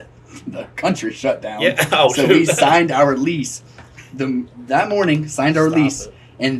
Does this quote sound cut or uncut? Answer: uncut